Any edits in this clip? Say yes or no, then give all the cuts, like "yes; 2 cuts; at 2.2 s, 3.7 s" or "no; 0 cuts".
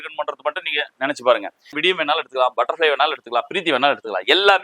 yes; 1 cut; at 1.8 s